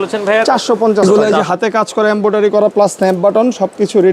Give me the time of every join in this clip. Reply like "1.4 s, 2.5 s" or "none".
1.0 s